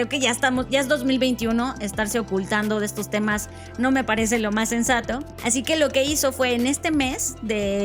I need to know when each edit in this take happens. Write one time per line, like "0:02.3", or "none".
0:05.3